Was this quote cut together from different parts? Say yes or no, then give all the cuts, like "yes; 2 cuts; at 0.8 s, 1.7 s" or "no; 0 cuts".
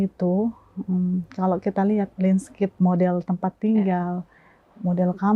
yes; 1 cut; at 2.7 s